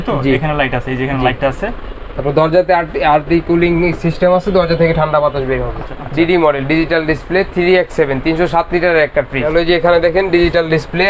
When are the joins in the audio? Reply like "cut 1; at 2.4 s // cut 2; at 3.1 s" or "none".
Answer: cut 1; at 5.8 s // cut 2; at 9.4 s